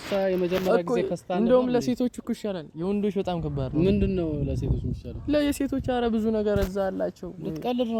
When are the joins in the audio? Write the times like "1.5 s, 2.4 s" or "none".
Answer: none